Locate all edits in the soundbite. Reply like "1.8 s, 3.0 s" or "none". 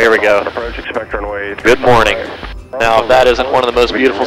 1.5 s, 2.6 s